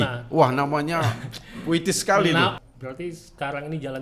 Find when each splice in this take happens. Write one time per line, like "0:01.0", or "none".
0:02.6